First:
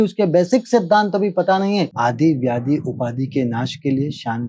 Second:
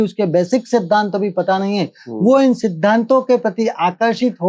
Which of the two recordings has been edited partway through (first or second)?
first